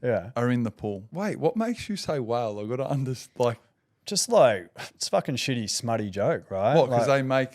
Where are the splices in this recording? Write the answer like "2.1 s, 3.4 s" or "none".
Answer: 1.1 s